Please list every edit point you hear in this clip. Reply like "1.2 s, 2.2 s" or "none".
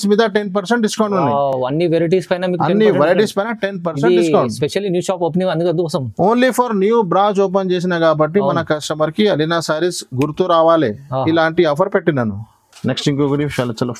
none